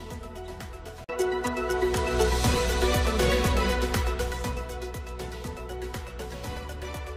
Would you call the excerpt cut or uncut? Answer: uncut